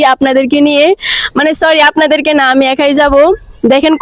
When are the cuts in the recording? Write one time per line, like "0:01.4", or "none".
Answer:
none